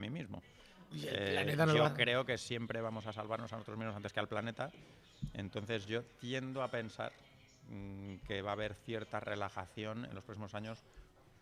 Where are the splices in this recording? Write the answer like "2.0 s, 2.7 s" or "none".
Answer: none